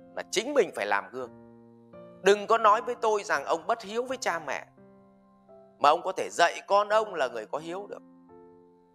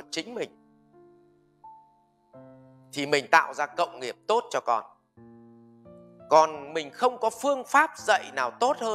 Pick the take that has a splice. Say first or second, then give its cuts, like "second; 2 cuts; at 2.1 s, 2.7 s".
first; 1 cut; at 8.0 s